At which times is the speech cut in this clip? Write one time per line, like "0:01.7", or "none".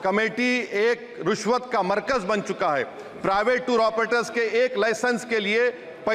none